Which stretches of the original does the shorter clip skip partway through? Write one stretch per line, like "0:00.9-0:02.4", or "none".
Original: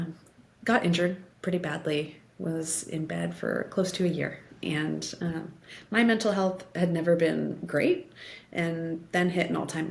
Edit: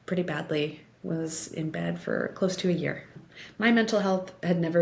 0:04.5-0:05.5

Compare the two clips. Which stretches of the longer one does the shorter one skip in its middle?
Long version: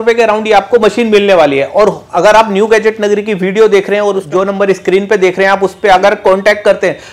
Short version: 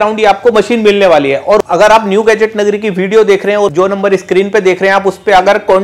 0:01.9-0:02.1
0:04.2-0:04.3

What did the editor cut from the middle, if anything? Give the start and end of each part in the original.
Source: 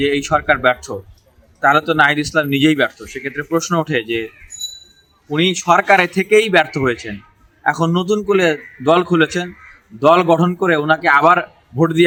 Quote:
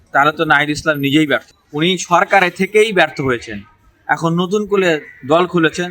0:03.1-0:05.1

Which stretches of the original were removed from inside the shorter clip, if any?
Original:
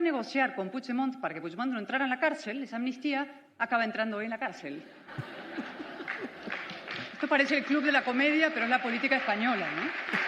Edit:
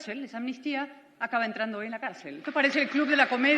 0:04.8-0:07.2

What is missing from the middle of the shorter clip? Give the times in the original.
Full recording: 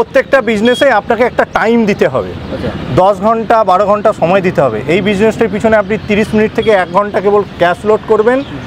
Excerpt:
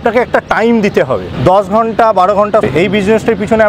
0:02.3-0:02.8
0:04.2-0:04.8

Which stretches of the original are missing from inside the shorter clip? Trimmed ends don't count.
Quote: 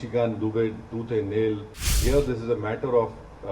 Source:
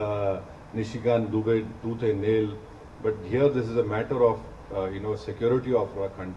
0:02.9-0:03.2

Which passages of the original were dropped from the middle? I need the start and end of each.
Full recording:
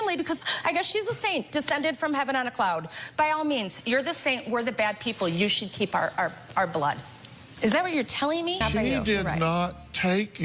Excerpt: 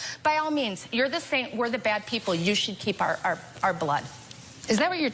none

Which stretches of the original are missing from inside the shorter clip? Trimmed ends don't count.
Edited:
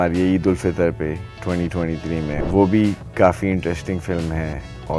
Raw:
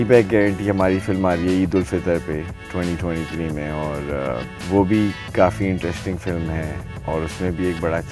0:03.7-0:04.6

